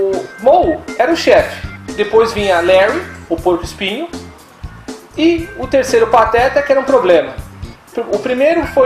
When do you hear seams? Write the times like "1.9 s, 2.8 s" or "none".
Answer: 6.6 s